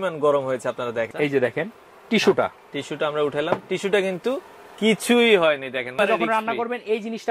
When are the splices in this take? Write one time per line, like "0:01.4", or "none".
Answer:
0:01.1
0:05.9